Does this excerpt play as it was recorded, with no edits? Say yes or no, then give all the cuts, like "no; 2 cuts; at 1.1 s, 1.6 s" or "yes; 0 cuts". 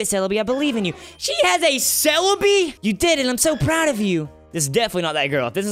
no; 1 cut; at 2.8 s